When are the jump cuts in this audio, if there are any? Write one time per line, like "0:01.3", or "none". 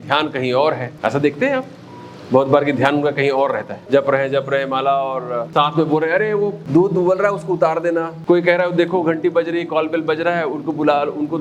0:00.9
0:03.7
0:05.5
0:06.6
0:08.1